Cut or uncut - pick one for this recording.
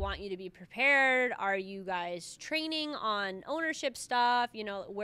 uncut